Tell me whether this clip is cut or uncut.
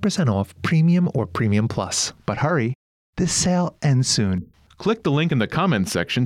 cut